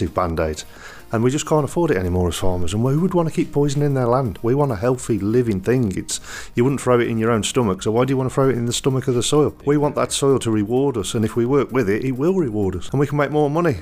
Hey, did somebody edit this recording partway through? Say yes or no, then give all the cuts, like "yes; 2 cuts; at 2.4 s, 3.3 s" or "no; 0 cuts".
yes; 2 cuts; at 9.6 s, 12.8 s